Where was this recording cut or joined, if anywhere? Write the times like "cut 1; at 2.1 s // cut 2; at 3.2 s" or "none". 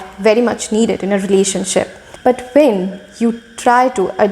cut 1; at 2.0 s